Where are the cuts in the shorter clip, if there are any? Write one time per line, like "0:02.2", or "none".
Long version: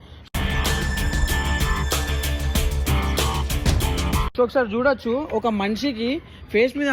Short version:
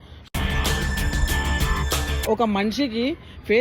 0:02.2